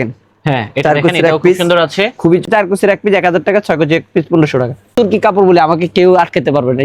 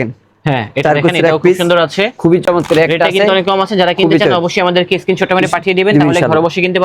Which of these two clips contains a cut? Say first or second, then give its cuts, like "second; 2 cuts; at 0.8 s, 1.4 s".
first; 2 cuts; at 2.4 s, 4.9 s